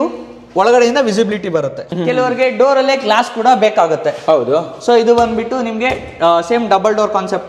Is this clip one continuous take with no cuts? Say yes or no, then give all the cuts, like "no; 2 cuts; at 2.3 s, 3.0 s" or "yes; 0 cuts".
no; 1 cut; at 1.8 s